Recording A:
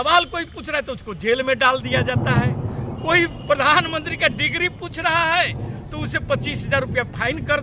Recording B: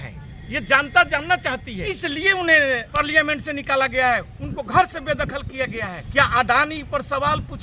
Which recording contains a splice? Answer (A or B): B